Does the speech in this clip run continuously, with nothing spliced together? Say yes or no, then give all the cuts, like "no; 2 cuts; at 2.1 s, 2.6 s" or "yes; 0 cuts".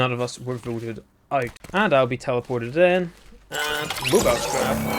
no; 1 cut; at 1.6 s